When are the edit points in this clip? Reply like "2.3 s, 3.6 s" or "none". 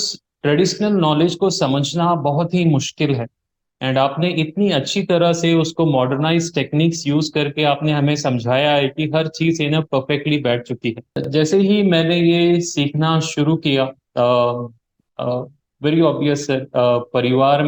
11.3 s